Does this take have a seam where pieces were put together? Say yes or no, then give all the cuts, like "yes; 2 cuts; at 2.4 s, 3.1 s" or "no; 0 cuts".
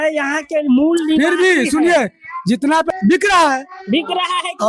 yes; 1 cut; at 2.9 s